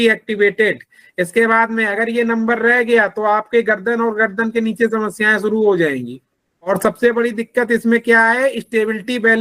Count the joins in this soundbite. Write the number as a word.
one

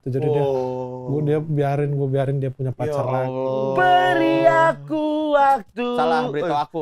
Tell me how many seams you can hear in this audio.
zero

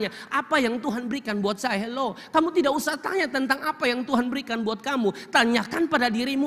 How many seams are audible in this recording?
zero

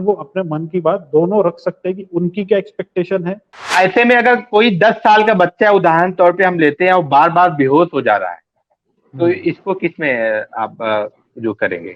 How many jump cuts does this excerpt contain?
one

